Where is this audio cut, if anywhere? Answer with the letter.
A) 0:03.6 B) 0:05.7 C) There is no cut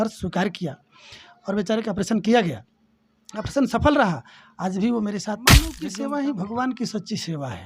B